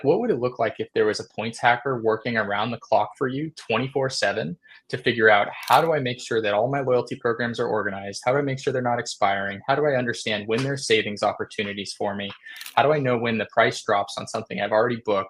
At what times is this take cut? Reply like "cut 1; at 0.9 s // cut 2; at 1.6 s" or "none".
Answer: none